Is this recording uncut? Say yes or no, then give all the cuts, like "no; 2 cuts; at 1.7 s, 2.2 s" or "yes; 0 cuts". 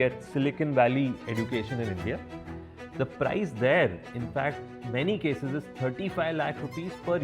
yes; 0 cuts